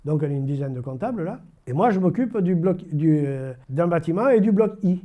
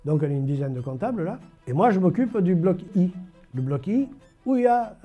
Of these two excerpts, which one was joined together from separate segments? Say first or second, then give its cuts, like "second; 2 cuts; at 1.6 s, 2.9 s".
second; 1 cut; at 2.9 s